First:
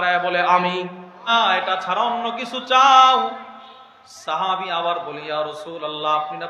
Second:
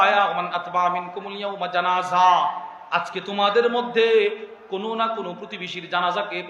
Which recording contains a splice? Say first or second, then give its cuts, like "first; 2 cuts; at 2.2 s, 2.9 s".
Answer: first; 1 cut; at 1.3 s